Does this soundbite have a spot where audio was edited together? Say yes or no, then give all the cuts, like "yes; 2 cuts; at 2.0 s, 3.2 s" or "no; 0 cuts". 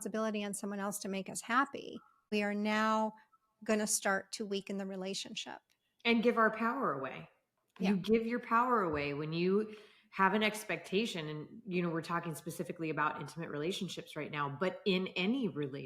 yes; 1 cut; at 2.3 s